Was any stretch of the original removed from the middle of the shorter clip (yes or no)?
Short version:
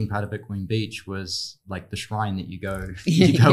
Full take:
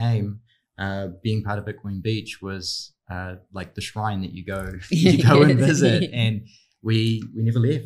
yes